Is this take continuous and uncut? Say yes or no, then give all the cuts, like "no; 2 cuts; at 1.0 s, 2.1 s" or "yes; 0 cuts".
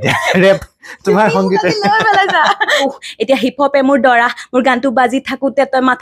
no; 1 cut; at 2.9 s